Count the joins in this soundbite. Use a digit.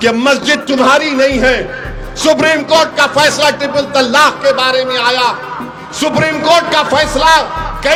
0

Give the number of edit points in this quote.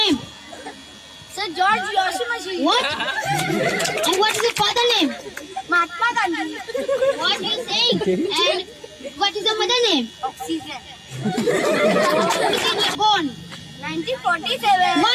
1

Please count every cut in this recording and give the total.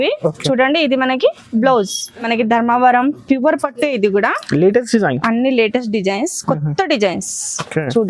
1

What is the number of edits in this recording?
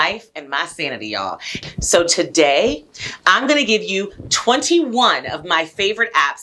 1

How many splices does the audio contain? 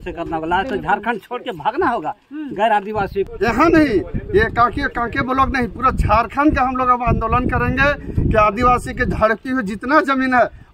1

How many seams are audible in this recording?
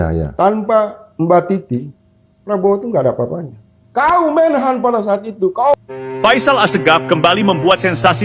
1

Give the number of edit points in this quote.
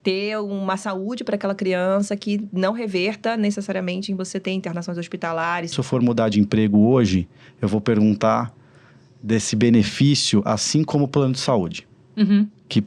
1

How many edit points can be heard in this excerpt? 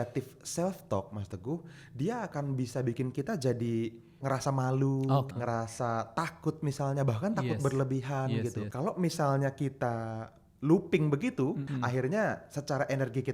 4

